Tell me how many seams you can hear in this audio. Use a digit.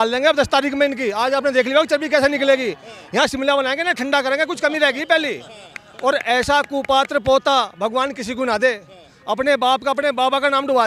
0